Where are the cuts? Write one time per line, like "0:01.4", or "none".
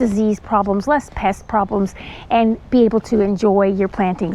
none